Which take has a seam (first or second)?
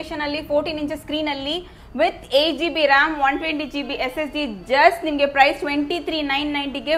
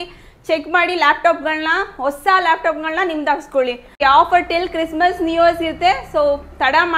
second